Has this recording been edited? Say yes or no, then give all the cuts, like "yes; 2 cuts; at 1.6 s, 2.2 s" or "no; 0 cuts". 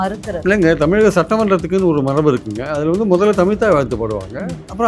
no; 0 cuts